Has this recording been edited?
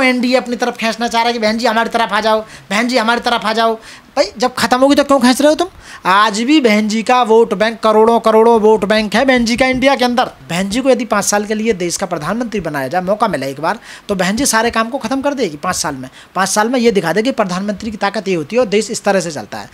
yes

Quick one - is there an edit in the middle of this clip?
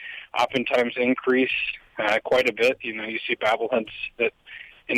no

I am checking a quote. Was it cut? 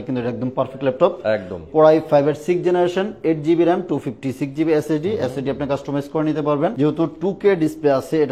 yes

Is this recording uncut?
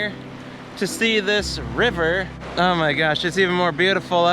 no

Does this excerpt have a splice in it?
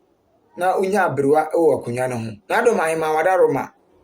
yes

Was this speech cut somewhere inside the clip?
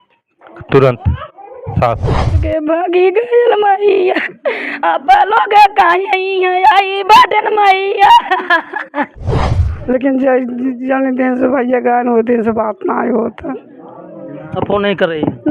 yes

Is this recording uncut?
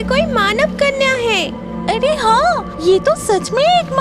no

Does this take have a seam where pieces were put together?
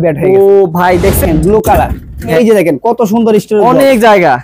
yes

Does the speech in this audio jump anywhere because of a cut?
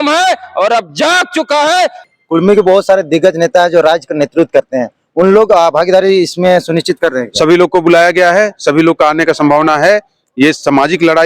yes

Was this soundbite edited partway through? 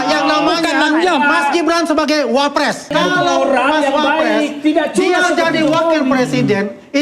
yes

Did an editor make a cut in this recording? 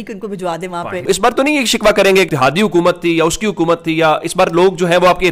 yes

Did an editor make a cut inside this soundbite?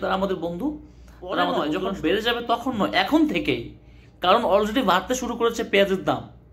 yes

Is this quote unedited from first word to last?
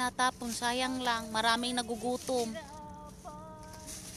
yes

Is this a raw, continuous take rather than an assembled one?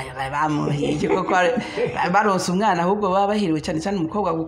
yes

